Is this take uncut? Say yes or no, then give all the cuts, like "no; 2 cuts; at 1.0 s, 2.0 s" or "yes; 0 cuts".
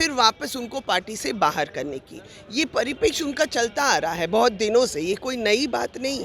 yes; 0 cuts